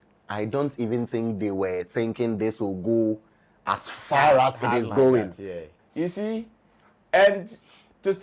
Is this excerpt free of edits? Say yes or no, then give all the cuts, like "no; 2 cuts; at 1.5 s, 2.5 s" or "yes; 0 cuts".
no; 1 cut; at 5.8 s